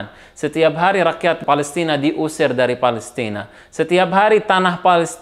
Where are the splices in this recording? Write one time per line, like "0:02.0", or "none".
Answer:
0:01.4